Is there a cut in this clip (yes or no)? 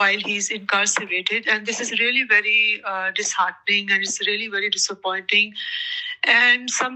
no